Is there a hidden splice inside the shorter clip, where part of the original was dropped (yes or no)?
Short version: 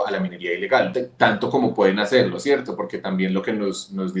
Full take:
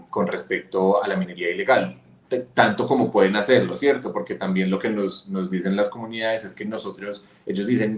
yes